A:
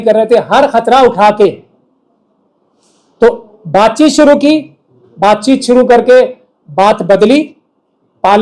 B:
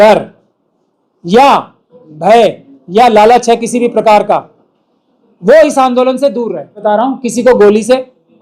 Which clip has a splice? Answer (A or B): B